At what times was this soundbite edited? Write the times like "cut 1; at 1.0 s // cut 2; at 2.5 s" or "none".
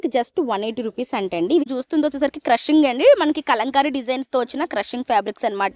cut 1; at 1.6 s